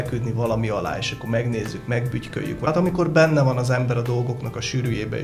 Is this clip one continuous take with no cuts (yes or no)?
no